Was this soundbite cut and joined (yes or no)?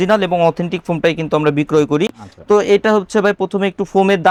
no